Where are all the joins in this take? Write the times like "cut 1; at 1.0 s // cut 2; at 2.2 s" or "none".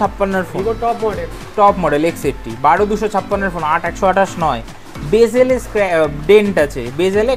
none